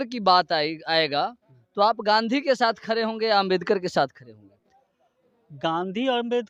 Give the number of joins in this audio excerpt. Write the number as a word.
zero